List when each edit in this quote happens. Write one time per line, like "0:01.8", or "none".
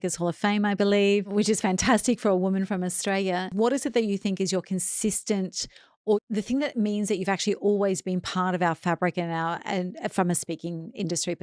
0:03.5
0:06.2